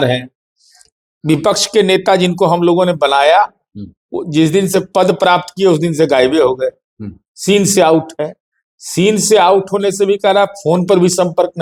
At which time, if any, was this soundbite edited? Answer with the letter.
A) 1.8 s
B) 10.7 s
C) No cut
C